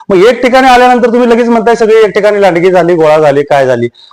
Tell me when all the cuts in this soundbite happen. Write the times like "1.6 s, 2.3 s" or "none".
none